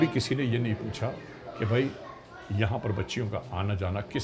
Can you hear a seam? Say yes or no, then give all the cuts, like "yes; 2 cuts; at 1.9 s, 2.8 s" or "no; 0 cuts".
no; 0 cuts